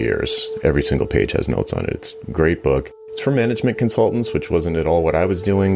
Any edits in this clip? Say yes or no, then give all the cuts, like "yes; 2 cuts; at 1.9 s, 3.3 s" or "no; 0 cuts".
no; 0 cuts